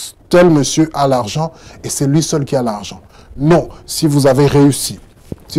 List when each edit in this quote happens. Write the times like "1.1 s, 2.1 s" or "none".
none